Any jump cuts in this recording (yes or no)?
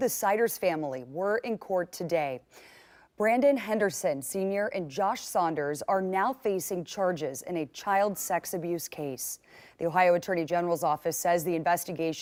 no